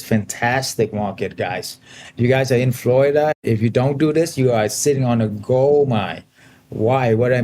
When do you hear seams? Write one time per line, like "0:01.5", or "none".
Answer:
0:03.4